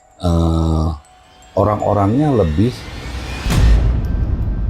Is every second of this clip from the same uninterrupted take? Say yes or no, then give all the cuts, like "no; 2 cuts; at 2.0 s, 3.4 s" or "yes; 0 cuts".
no; 1 cut; at 3.3 s